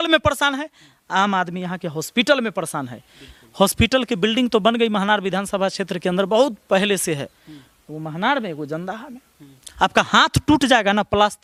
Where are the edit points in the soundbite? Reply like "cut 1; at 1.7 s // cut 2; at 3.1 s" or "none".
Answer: none